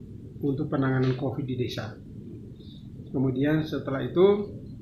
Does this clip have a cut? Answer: no; 0 cuts

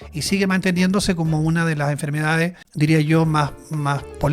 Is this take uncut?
no; 1 cut; at 2.6 s

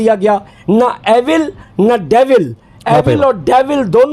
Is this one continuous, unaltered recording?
yes; 0 cuts

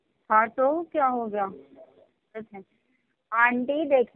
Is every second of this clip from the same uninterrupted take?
no; 1 cut; at 2.5 s

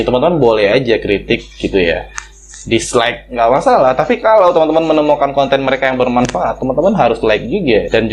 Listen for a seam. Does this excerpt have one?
no; 0 cuts

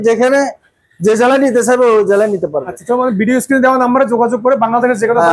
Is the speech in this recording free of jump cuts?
yes; 0 cuts

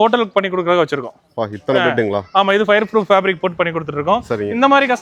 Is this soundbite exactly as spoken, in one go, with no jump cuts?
yes; 0 cuts

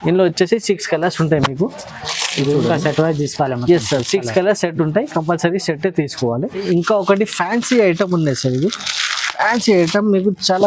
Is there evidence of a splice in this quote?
yes; 1 cut; at 6.6 s

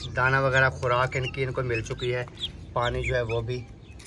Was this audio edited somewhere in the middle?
no; 0 cuts

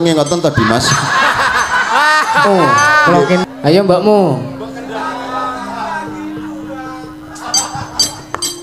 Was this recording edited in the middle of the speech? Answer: yes; 1 cut; at 3.4 s

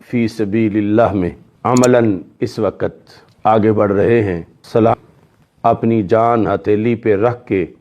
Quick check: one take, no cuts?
no; 1 cut; at 4.9 s

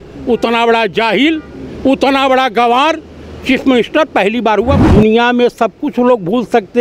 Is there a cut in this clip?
yes; 1 cut; at 4.8 s

